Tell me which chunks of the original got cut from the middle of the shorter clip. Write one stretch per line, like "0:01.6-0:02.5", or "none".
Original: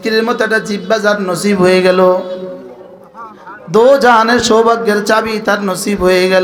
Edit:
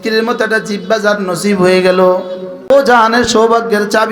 0:02.7-0:03.8